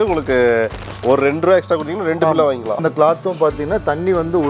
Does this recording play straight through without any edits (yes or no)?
no